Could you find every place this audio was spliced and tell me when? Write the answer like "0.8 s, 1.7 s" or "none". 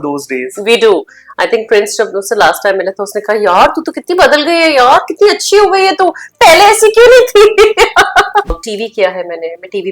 8.5 s